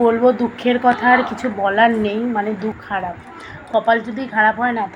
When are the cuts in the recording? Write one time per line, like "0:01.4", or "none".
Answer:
0:02.8